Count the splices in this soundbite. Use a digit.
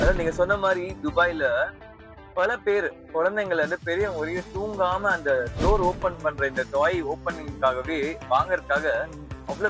0